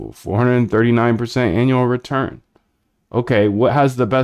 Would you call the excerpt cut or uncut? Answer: cut